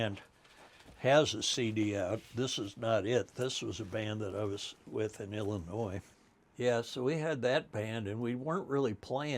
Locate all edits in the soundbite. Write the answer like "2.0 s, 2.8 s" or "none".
6.1 s